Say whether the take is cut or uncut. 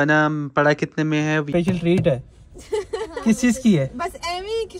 cut